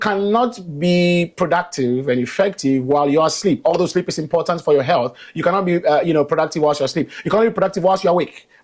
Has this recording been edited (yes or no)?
no